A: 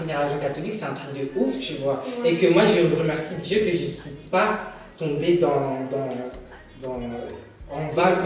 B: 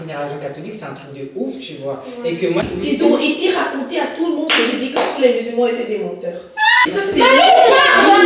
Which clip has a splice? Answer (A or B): B